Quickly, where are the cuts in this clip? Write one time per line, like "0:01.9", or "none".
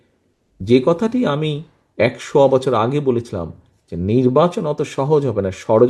none